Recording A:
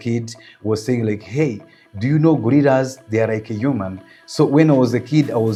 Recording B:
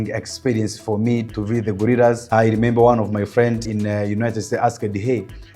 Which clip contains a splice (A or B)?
B